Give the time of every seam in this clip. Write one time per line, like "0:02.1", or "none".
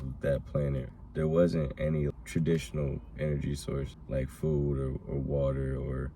0:00.9
0:02.1
0:04.0